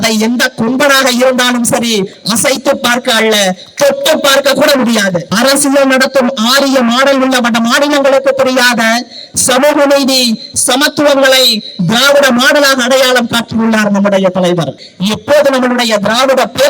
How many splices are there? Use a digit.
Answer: 2